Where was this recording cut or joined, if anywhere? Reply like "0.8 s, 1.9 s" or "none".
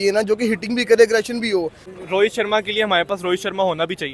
1.8 s